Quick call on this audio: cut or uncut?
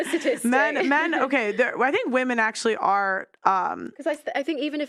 uncut